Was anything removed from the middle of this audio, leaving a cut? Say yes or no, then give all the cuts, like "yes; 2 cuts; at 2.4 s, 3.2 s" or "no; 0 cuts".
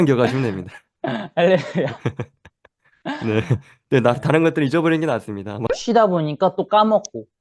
yes; 1 cut; at 5.6 s